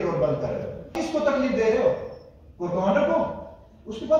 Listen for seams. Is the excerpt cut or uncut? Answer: cut